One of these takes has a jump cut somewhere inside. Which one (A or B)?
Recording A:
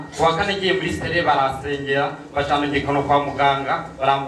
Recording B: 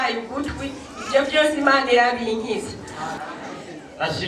B